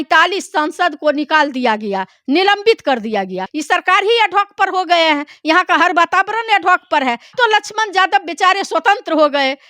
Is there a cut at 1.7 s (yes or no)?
no